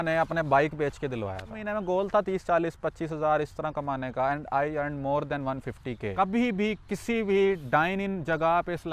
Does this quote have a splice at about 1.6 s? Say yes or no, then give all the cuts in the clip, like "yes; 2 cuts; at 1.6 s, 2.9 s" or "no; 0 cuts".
yes; 2 cuts; at 1.6 s, 6.1 s